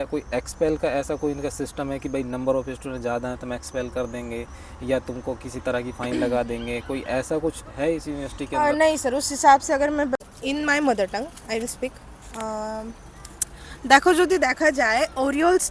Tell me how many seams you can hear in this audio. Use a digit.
1